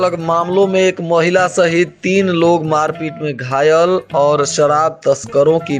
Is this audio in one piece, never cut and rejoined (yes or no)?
yes